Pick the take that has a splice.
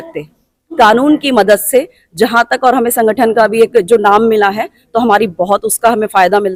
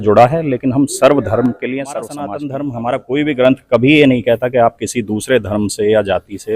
second; 1 cut; at 2.3 s

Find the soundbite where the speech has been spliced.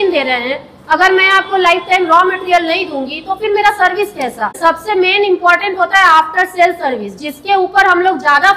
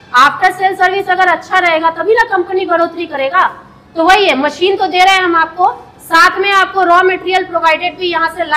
first; 1 cut; at 4.5 s

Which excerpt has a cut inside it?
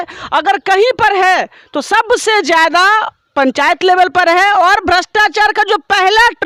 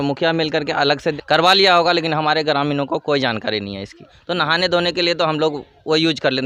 second; 2 cuts; at 1.1 s, 4.1 s

